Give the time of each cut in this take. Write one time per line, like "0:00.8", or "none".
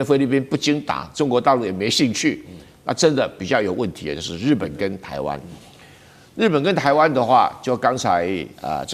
none